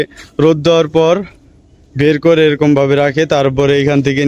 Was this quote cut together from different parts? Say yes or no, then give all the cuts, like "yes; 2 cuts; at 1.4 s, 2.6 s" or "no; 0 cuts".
no; 0 cuts